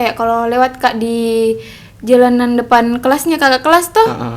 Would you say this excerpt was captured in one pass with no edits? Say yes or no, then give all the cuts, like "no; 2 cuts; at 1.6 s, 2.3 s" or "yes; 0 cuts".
yes; 0 cuts